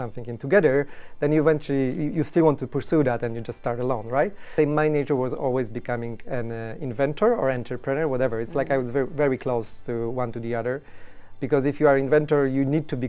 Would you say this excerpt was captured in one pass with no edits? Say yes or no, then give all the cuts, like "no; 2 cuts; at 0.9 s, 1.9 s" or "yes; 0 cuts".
no; 1 cut; at 4.5 s